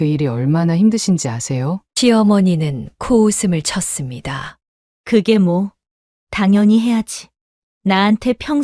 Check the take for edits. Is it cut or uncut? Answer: uncut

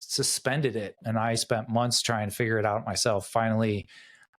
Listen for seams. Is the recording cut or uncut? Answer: cut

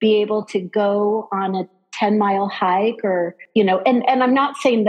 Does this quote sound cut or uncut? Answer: cut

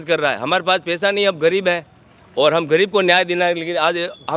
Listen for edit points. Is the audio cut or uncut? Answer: uncut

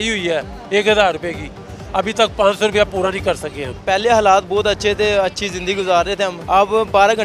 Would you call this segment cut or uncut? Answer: cut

